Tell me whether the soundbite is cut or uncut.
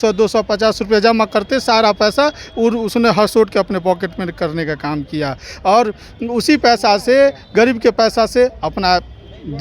uncut